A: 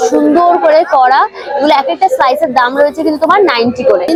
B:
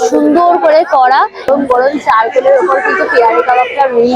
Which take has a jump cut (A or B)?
B